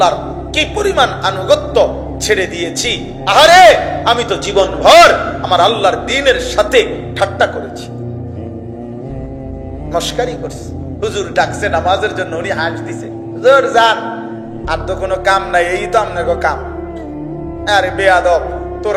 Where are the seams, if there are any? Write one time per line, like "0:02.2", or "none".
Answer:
none